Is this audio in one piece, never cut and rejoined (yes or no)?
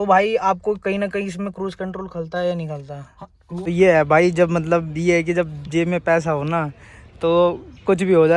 no